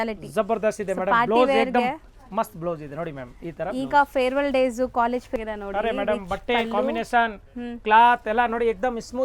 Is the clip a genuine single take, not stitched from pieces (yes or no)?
no